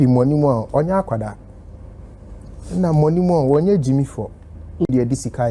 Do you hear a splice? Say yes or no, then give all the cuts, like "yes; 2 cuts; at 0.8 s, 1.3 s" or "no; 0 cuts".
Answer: no; 0 cuts